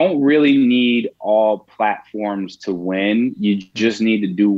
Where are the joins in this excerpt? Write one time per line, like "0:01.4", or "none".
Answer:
none